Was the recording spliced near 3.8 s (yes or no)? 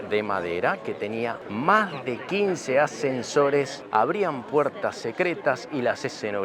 yes